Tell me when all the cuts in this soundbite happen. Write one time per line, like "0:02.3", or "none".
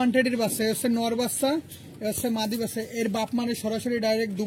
none